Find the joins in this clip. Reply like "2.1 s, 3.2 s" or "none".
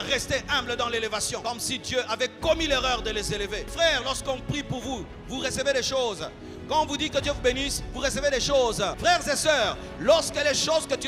1.4 s, 3.7 s, 8.9 s